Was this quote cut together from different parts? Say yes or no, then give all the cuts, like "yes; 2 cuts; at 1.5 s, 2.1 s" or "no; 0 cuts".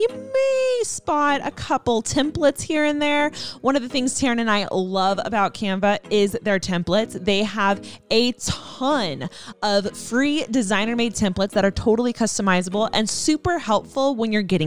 no; 0 cuts